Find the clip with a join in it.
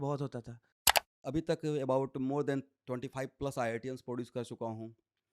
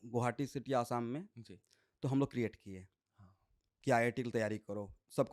first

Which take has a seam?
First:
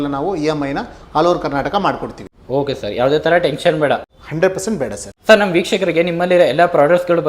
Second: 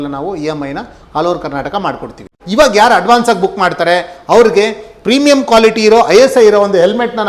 second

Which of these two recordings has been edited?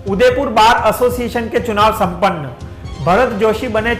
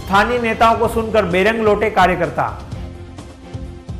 second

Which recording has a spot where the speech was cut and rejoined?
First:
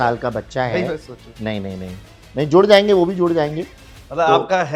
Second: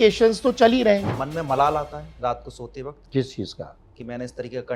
second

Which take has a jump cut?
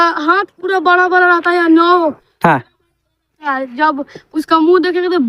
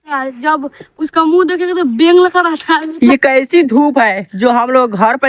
second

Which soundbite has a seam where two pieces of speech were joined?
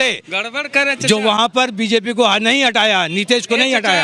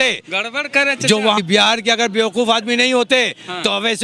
second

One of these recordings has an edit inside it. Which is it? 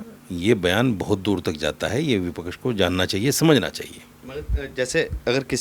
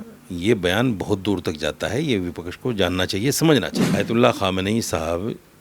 second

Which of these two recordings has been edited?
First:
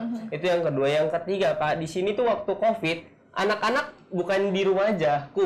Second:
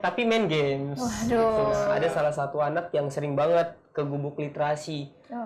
second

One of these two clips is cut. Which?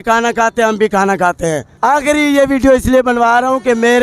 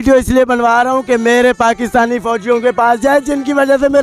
first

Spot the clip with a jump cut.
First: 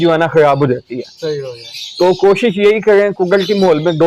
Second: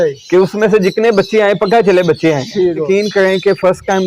second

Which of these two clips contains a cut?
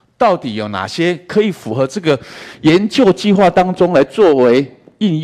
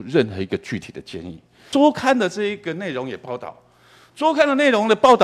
second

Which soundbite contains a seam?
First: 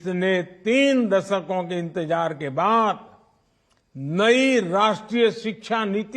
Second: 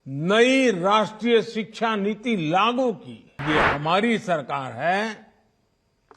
second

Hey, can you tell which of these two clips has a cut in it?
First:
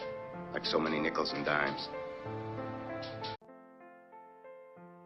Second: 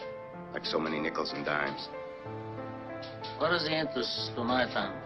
second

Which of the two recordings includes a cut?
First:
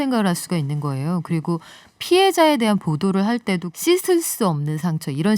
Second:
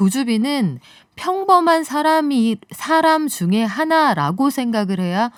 first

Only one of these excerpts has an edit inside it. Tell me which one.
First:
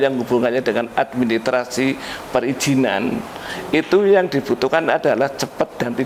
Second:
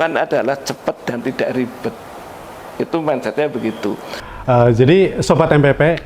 second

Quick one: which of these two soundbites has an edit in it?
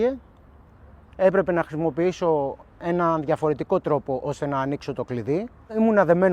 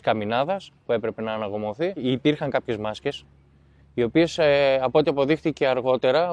second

